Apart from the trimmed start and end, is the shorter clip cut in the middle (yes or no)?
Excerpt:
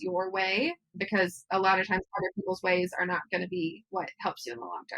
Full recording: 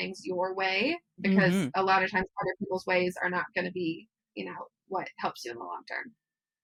yes